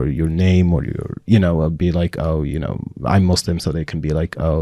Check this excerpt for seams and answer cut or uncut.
uncut